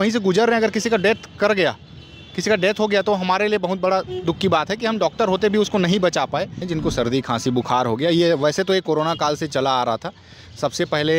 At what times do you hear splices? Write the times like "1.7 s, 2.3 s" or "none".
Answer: 6.6 s